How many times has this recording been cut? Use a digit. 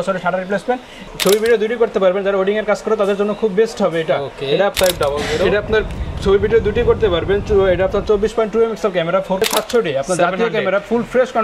3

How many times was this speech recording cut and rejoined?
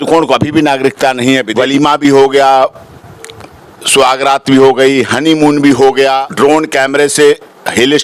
2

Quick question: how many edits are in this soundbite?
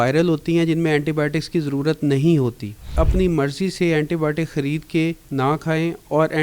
1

